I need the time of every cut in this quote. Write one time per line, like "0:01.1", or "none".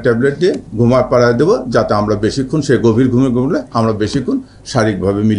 none

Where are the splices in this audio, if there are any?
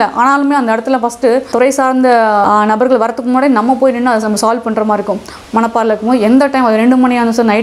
0:01.5
0:02.4
0:05.3

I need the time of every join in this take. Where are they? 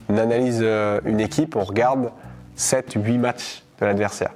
none

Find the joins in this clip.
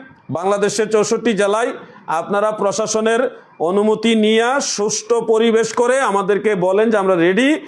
none

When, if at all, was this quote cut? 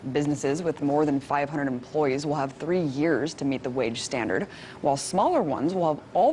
0:02.5

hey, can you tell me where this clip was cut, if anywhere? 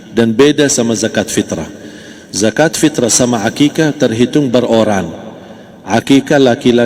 none

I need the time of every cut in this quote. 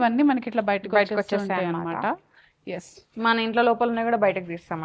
none

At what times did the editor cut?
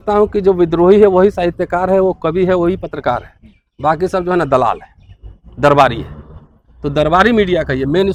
none

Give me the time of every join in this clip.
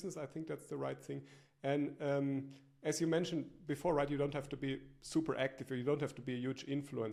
none

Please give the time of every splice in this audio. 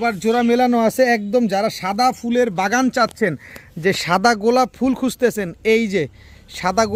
none

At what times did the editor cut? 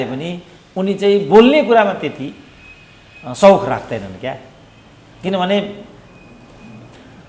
none

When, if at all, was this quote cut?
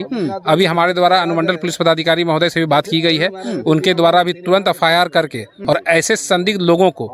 none

